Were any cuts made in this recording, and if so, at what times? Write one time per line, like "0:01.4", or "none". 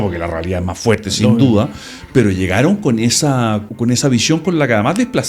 0:03.7